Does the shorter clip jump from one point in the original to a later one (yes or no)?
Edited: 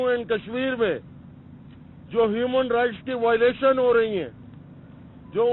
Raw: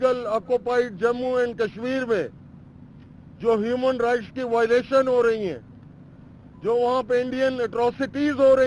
no